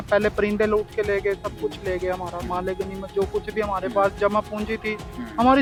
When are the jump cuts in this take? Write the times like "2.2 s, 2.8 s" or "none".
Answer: none